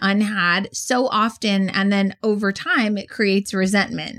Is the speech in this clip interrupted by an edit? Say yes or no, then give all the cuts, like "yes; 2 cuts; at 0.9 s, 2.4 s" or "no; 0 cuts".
no; 0 cuts